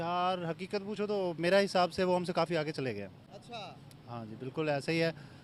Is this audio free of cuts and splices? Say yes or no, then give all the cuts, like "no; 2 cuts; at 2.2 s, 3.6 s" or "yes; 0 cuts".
yes; 0 cuts